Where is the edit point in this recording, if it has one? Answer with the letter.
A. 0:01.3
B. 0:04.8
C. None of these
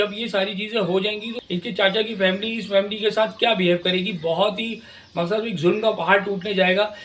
A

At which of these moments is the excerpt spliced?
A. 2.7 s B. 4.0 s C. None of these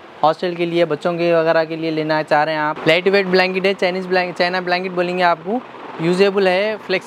A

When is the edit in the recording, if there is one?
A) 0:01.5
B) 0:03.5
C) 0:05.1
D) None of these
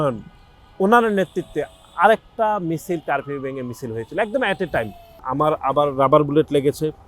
C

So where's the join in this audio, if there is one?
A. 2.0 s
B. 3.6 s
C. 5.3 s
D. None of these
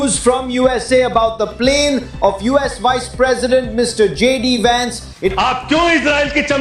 C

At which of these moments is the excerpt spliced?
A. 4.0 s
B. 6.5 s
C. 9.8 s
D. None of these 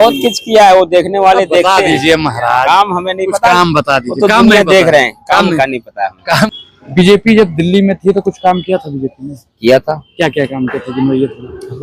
B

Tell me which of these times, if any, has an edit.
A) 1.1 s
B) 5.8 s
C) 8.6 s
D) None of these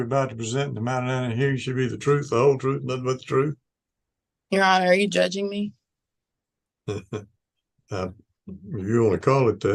D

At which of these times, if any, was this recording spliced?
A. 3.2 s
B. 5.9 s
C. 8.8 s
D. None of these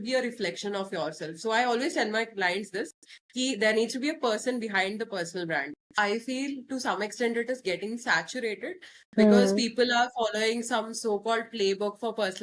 B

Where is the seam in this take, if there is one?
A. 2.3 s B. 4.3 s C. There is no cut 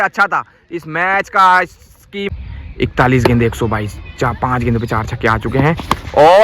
A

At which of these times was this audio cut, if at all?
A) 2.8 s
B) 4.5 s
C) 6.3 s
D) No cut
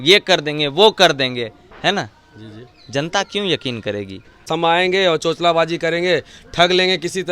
B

